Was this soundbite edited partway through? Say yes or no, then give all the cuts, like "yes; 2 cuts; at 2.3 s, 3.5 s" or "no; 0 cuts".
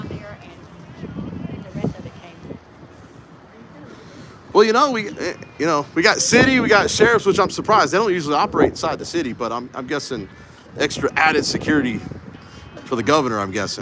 no; 0 cuts